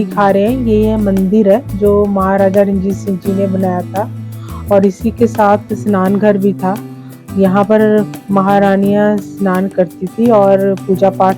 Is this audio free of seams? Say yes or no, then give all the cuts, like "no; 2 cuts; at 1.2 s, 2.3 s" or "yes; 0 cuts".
yes; 0 cuts